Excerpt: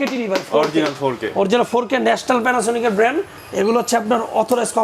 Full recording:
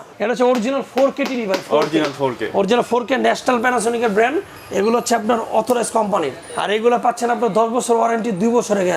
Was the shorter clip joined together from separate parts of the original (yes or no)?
no